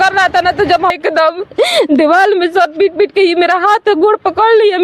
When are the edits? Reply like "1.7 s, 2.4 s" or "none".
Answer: 0.9 s